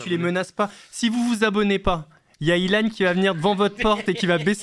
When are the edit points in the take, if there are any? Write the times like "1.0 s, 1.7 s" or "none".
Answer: none